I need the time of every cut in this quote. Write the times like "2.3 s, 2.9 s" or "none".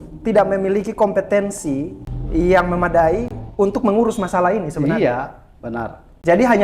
none